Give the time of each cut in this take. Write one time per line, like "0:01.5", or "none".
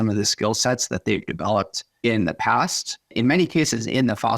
0:01.8
0:03.1